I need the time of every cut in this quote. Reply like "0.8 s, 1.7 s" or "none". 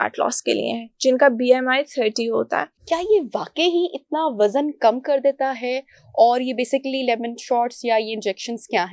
2.7 s